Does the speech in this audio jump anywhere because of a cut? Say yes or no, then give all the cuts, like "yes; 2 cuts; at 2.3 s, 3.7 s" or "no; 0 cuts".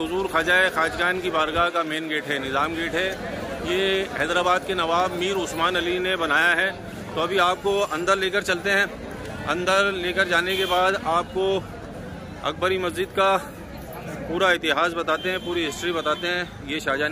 no; 0 cuts